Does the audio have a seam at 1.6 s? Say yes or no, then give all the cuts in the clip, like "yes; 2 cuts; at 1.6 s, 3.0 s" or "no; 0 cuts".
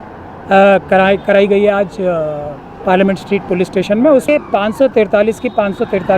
no; 1 cut; at 4.3 s